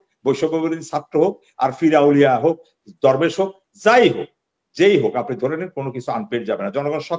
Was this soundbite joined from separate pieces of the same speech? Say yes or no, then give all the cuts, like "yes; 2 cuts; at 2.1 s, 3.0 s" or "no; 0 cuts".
no; 0 cuts